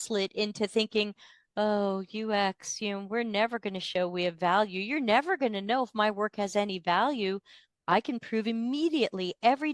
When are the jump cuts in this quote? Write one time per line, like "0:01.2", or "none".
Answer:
none